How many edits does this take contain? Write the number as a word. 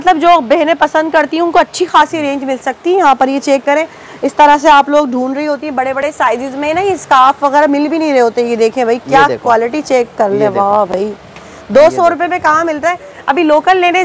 zero